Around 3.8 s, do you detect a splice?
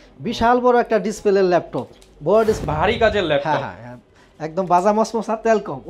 no; 1 cut; at 2.6 s

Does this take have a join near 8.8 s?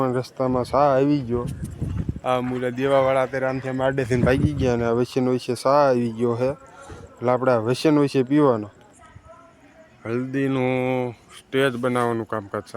yes; 1 cut; at 8.8 s

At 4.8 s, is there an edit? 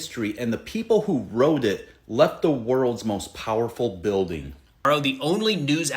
yes; 1 cut; at 4.8 s

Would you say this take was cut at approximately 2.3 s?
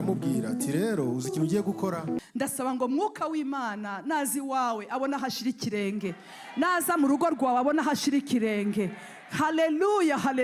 yes; 1 cut; at 2.3 s

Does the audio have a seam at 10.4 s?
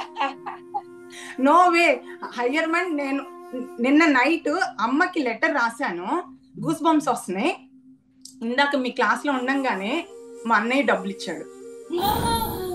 no; 0 cuts

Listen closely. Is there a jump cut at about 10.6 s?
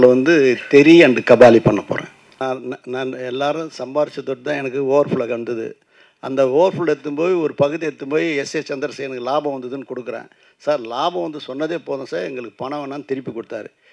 no; 1 cut; at 2.4 s

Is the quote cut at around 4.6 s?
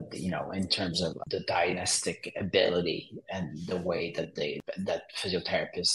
yes; 2 cuts; at 1.2 s, 4.6 s

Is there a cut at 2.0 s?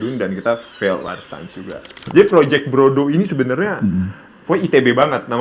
yes; 1 cut; at 2.0 s

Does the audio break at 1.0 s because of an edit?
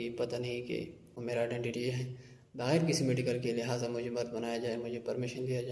yes; 1 cut; at 1.0 s

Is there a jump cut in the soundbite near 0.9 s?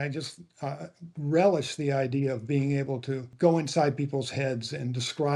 no; 1 cut; at 3.3 s

